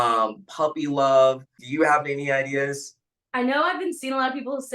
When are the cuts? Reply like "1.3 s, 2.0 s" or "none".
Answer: 1.6 s